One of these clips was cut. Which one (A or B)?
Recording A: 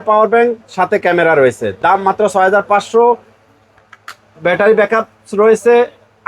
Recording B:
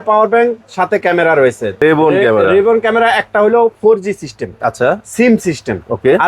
B